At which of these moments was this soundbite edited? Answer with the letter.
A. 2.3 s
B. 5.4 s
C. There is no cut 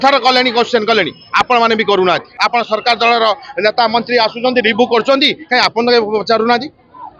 A